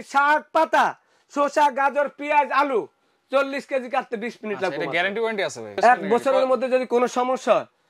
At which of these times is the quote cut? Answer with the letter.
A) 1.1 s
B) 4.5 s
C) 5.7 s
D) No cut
C